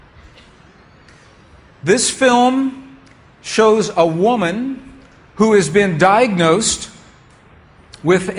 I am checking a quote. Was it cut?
no; 0 cuts

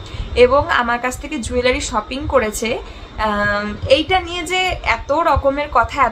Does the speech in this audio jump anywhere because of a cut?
no; 0 cuts

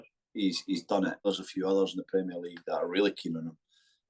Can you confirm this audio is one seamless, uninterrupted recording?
no; 1 cut; at 1.2 s

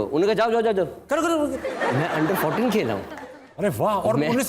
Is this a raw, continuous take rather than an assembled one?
yes; 0 cuts

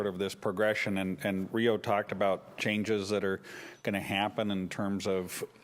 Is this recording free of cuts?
no; 1 cut; at 4.5 s

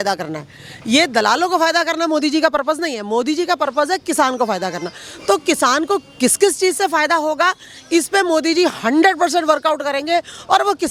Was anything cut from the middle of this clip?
no; 0 cuts

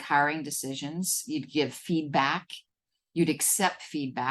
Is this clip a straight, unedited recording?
yes; 0 cuts

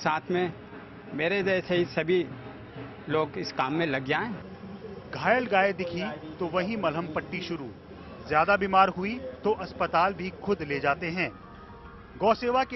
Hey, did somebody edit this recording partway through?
yes; 1 cut; at 9.0 s

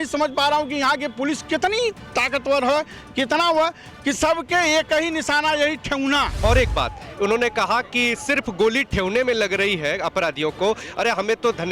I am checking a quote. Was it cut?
yes; 1 cut; at 6.4 s

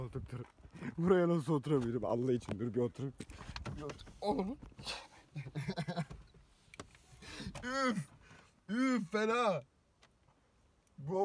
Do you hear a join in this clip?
no; 0 cuts

